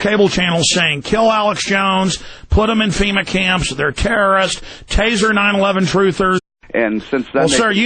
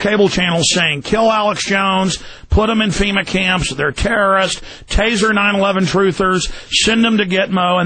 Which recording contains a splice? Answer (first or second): second